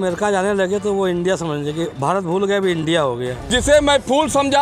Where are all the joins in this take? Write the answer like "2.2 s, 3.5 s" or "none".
3.4 s